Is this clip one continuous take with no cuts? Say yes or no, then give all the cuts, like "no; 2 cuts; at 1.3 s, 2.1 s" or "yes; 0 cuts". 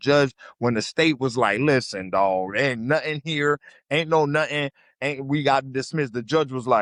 yes; 0 cuts